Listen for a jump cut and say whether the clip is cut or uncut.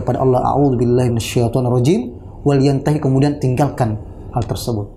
uncut